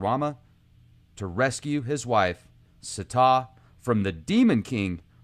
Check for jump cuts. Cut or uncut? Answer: cut